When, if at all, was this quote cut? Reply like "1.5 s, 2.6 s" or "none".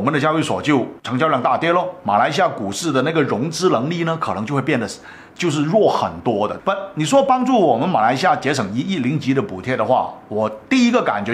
6.6 s